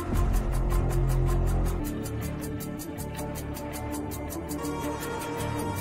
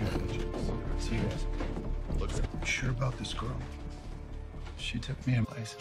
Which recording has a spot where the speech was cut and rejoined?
second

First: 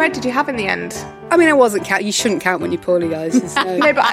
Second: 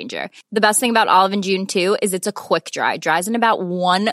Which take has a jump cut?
first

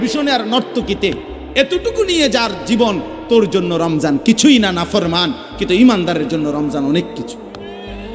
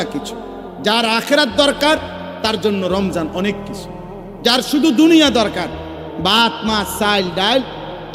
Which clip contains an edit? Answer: first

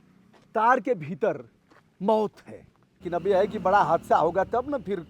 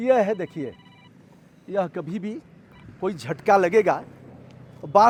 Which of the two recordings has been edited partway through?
first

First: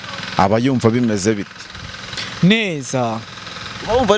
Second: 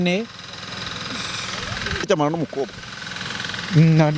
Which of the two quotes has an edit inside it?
second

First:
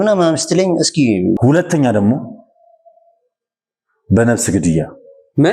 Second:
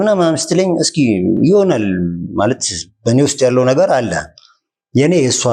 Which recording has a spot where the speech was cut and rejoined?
first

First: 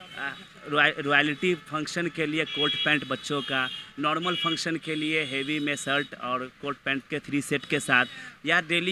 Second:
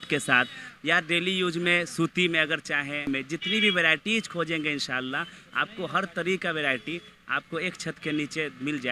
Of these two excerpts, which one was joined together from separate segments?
second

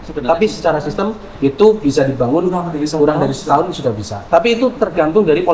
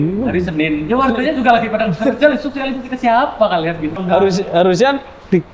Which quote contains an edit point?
second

